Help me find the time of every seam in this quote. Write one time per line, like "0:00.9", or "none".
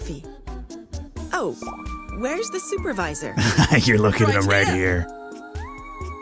none

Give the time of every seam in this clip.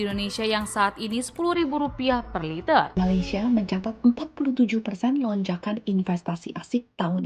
0:02.9

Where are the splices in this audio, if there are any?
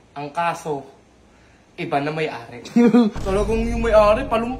0:03.2

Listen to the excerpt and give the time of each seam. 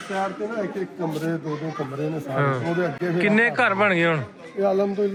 none

